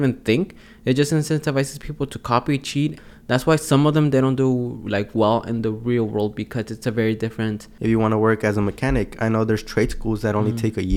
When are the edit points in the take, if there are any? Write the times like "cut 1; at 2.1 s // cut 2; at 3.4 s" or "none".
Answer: cut 1; at 3.0 s // cut 2; at 7.7 s